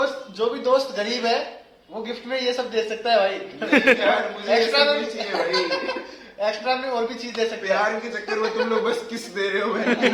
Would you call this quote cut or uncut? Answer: uncut